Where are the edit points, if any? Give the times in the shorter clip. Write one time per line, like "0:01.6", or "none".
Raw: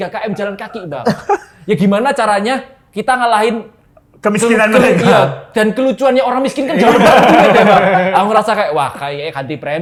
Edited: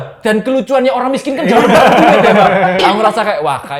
none